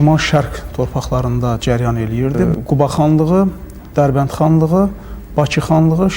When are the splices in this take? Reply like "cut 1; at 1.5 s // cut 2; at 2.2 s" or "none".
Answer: cut 1; at 2.5 s